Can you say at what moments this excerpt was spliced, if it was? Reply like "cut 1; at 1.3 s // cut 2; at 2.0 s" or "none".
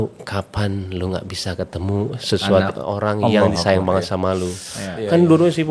none